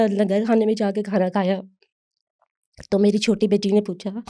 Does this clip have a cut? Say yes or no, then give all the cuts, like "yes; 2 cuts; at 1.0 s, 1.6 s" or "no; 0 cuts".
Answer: no; 0 cuts